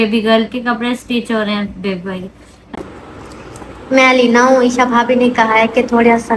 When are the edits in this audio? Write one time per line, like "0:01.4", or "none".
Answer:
0:02.8